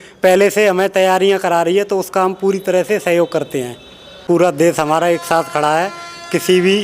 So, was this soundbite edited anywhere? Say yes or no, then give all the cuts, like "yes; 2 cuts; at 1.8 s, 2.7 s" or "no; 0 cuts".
yes; 1 cut; at 4.2 s